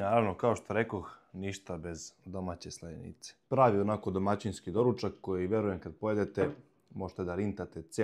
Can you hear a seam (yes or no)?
yes